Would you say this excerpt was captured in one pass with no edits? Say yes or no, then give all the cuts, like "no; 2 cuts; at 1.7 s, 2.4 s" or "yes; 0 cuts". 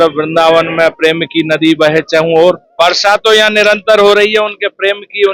no; 1 cut; at 2.7 s